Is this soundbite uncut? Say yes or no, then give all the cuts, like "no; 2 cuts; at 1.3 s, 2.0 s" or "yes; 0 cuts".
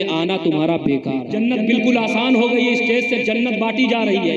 no; 1 cut; at 1.3 s